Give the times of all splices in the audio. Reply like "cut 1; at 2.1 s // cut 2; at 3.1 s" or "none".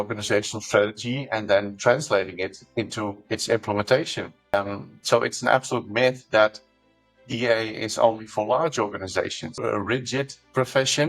cut 1; at 4.5 s // cut 2; at 9.6 s